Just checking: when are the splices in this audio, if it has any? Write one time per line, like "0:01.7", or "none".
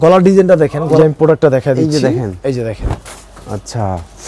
0:01.0